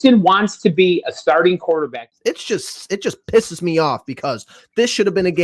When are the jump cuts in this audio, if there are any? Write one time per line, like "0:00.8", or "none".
0:01.9

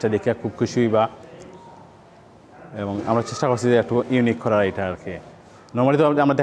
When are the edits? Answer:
none

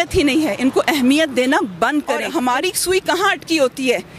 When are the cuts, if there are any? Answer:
0:02.2

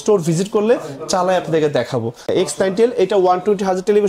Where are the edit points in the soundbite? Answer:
0:02.3

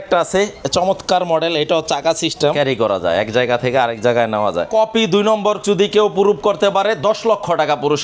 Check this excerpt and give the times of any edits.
0:02.5
0:04.7

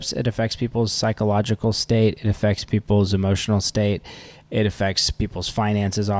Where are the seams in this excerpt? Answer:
none

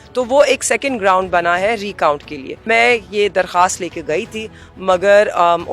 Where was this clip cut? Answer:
0:02.6

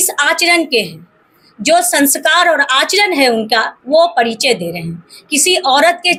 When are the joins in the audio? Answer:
none

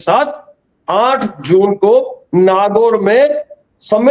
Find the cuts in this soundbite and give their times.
none

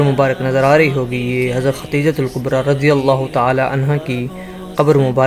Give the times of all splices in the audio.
none

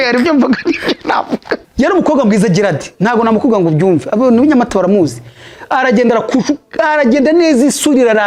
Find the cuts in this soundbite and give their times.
0:01.6

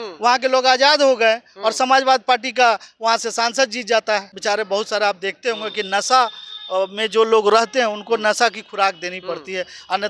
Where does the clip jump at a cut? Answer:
0:04.3

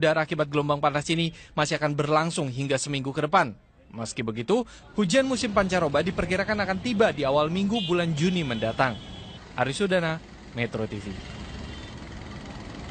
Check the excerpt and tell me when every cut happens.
0:07.1

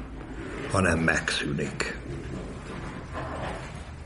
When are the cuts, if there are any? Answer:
none

